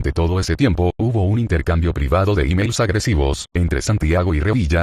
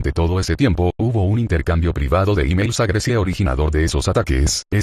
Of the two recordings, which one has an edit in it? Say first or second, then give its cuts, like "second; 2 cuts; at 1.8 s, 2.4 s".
first; 1 cut; at 3.1 s